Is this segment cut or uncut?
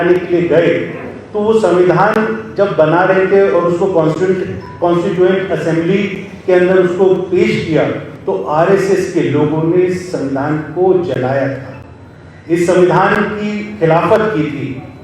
uncut